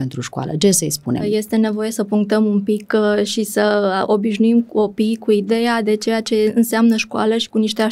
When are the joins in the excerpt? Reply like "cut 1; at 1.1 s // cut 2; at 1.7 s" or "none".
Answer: cut 1; at 1.2 s